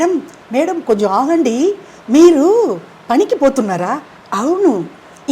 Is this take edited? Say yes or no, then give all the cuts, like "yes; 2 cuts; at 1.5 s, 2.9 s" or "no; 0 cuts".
no; 0 cuts